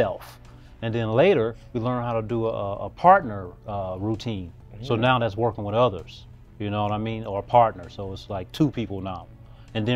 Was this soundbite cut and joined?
no; 0 cuts

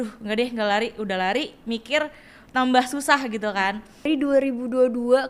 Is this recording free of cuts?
no; 1 cut; at 4.1 s

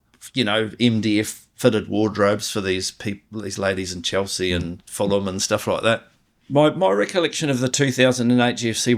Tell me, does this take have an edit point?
yes; 1 cut; at 6.1 s

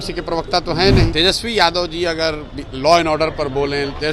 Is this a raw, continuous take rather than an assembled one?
no; 1 cut; at 1.1 s

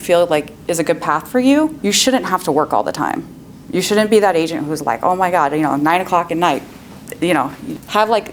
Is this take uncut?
yes; 0 cuts

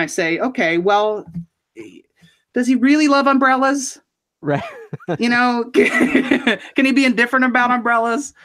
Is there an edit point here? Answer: no; 0 cuts

